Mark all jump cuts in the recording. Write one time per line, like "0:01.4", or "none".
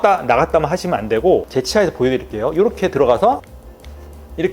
0:01.5